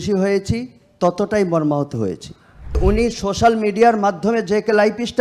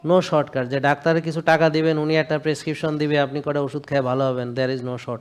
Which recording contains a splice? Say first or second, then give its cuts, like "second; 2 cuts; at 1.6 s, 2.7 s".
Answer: first; 1 cut; at 2.8 s